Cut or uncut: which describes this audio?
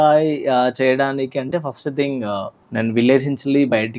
cut